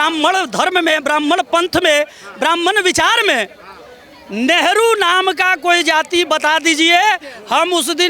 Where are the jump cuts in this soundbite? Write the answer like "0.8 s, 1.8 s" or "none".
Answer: none